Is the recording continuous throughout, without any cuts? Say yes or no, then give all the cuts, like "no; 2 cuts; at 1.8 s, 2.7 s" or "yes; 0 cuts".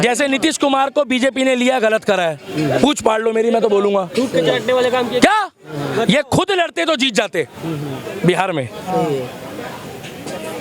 yes; 0 cuts